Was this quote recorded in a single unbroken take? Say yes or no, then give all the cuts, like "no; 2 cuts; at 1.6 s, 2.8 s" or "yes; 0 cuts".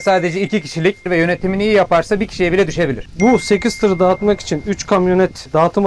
no; 2 cuts; at 1.1 s, 3.0 s